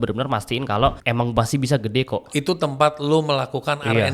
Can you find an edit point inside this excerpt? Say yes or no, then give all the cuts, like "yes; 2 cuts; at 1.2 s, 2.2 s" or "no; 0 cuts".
yes; 1 cut; at 1.0 s